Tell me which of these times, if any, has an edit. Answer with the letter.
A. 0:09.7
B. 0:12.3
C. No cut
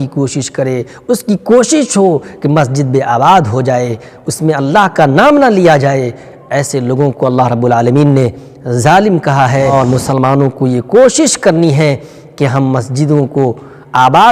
A